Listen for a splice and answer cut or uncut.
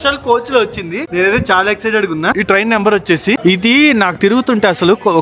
cut